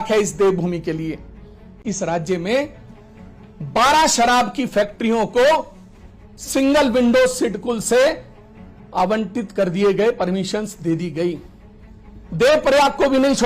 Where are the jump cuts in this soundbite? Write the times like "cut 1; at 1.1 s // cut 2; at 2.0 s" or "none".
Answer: cut 1; at 1.8 s